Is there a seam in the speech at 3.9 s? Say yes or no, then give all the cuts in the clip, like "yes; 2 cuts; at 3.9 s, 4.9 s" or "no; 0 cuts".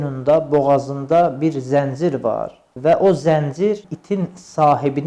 yes; 2 cuts; at 2.6 s, 3.9 s